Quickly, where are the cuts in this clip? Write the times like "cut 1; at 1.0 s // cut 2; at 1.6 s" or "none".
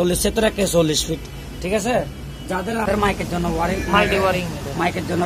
cut 1; at 2.9 s

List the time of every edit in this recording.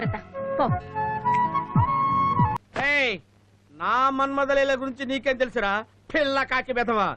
cut 1; at 2.5 s

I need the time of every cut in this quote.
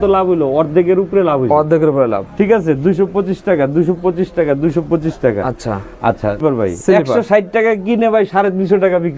none

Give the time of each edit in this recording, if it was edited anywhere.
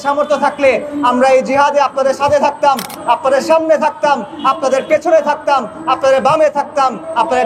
none

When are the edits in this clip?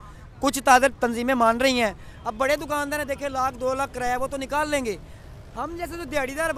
cut 1; at 1.0 s

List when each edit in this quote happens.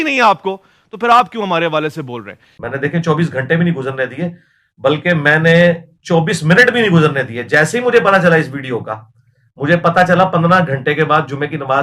cut 1; at 2.5 s

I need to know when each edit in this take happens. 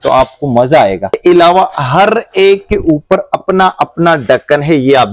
cut 1; at 1.2 s

